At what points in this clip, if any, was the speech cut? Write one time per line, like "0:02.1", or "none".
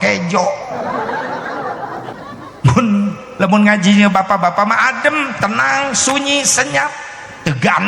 0:02.1